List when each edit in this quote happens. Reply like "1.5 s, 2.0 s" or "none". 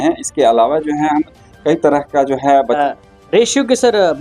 2.8 s